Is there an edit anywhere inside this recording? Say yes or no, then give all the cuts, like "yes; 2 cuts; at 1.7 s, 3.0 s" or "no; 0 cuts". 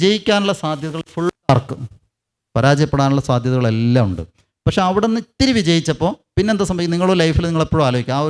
no; 0 cuts